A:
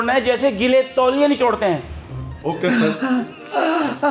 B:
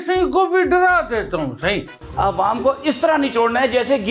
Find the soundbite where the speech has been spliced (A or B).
B